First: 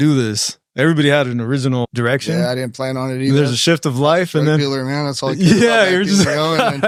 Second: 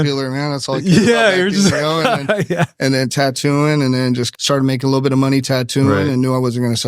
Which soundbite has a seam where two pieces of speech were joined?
second; 1 cut; at 4.3 s

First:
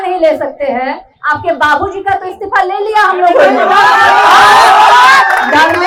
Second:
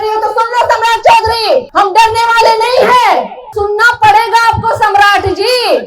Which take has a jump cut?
second; 2 cuts; at 1.7 s, 3.4 s

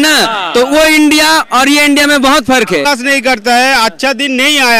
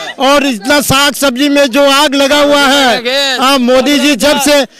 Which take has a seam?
first; 1 cut; at 2.9 s

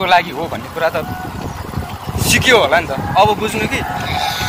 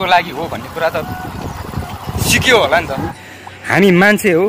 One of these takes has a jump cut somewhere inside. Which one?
second; 1 cut; at 3.1 s

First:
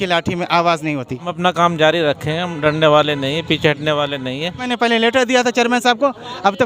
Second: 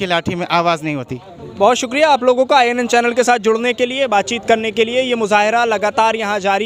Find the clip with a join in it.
first; 2 cuts; at 1.3 s, 4.7 s

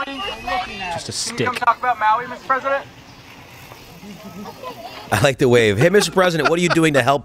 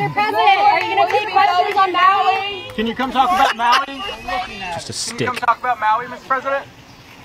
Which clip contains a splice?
first; 1 cut; at 5.0 s

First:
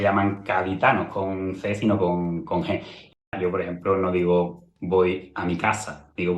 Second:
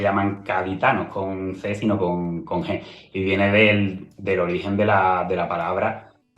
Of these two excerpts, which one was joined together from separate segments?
first; 1 cut; at 3.3 s

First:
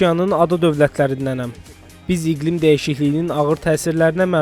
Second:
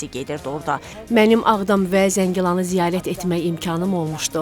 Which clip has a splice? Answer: second; 1 cut; at 0.9 s

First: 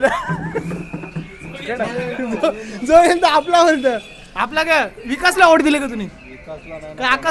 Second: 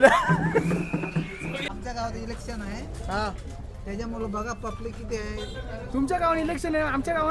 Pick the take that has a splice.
second; 1 cut; at 1.6 s

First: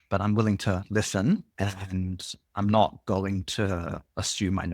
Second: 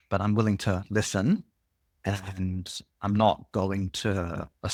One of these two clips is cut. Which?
first; 1 cut; at 1.5 s

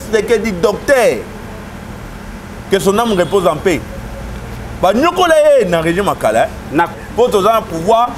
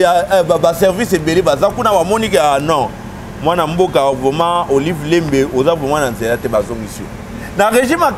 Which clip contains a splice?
first; 1 cut; at 6.9 s

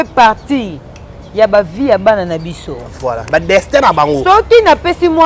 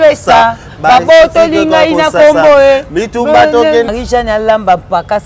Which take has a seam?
second; 1 cut; at 3.9 s

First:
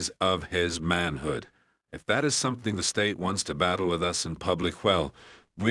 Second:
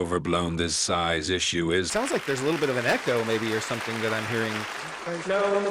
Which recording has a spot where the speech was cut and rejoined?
second; 1 cut; at 1.9 s

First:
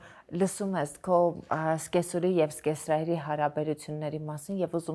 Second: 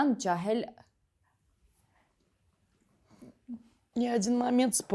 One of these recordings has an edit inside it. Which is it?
second; 1 cut; at 3.8 s

